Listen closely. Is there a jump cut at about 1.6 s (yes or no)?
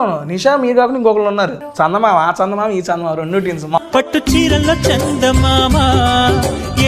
yes